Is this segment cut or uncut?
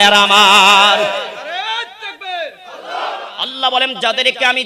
cut